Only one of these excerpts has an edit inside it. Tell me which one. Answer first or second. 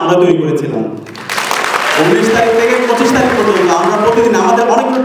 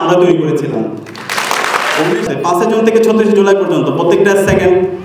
second